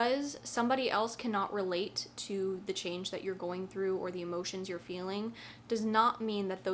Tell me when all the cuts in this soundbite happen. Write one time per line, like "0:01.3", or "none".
none

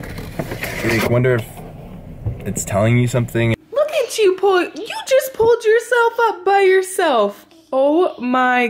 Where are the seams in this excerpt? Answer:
0:03.5

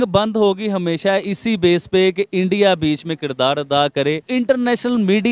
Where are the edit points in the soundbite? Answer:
0:04.2

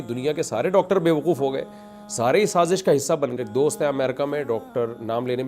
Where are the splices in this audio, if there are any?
0:03.3

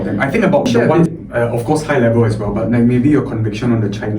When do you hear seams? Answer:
0:01.1

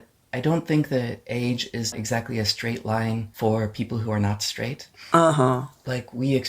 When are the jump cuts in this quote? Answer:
0:04.9

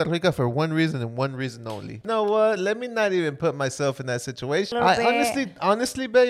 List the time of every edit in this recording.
0:02.0
0:04.7

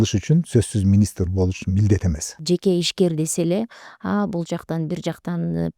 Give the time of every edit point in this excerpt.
0:02.3

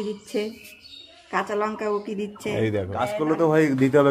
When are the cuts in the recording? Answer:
0:03.1

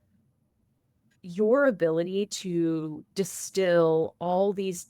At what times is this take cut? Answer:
0:01.0

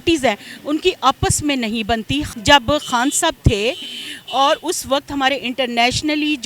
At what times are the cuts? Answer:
0:02.3

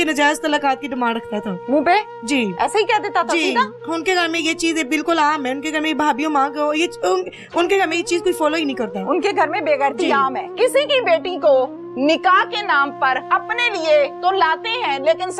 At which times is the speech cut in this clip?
0:10.5
0:13.2

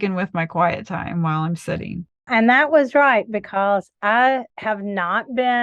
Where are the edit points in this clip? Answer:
0:04.5

